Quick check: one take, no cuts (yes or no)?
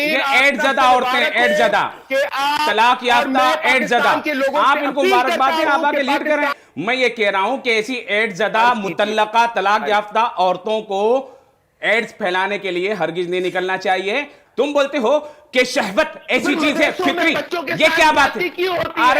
no